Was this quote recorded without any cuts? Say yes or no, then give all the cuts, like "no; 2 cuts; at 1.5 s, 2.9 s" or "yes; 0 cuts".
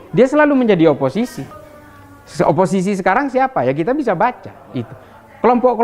yes; 0 cuts